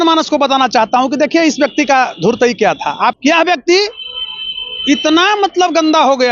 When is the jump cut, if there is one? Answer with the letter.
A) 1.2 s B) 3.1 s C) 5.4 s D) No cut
B